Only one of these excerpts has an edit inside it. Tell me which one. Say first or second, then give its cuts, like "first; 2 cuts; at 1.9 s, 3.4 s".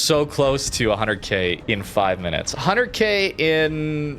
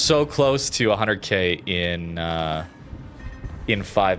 first; 1 cut; at 1.6 s